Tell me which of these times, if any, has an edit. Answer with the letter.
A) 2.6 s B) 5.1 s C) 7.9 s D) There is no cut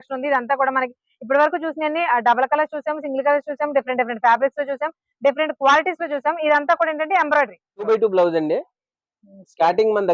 C